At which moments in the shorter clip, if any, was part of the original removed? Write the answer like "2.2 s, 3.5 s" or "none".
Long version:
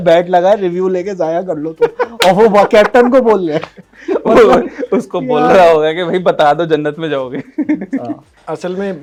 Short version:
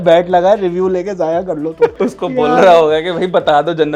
1.9 s